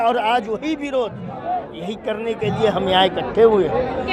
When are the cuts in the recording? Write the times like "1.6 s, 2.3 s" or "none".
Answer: none